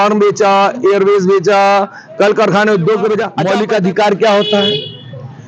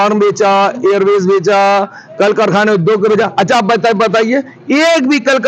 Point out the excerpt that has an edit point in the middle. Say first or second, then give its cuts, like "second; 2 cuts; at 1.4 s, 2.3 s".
first; 1 cut; at 3.3 s